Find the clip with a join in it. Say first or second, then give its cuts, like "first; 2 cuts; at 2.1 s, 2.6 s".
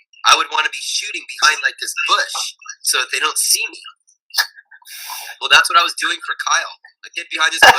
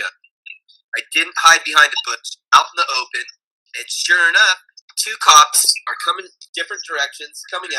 second; 2 cuts; at 4.7 s, 6.4 s